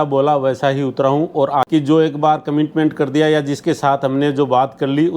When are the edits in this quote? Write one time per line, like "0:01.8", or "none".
0:01.7